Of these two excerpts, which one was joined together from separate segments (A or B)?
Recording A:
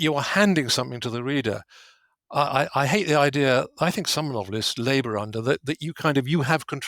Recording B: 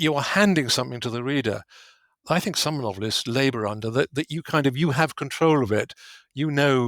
B